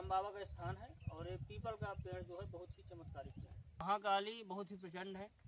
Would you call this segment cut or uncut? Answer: cut